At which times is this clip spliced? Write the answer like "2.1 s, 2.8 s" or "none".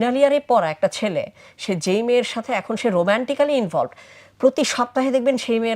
none